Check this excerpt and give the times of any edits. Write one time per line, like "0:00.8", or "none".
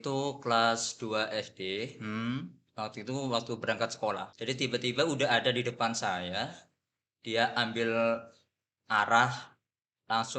0:04.3